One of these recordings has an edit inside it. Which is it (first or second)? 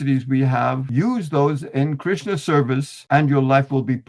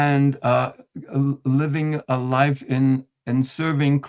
first